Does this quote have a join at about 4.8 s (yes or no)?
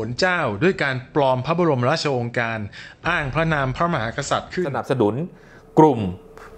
yes